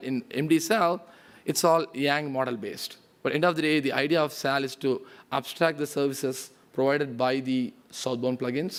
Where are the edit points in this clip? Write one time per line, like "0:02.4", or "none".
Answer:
none